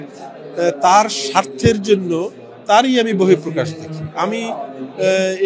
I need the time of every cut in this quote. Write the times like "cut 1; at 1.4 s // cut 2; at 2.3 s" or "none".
none